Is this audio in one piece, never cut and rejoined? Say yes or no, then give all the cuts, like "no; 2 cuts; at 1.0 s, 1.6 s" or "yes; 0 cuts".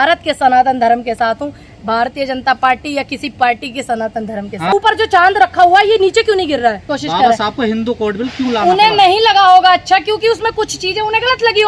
no; 2 cuts; at 4.7 s, 6.9 s